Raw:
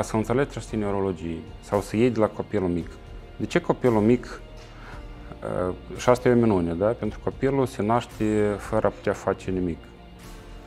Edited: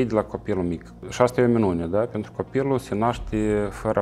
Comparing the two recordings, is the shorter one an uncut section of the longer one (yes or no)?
no